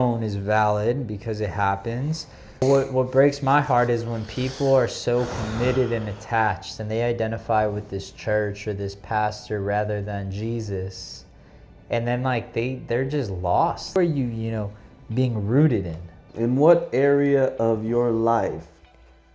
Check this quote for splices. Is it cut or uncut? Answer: cut